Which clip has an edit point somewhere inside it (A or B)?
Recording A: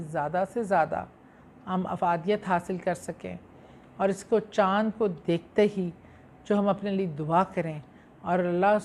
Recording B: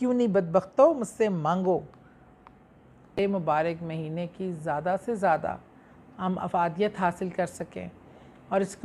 B